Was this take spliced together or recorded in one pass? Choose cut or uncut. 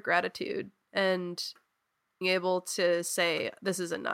cut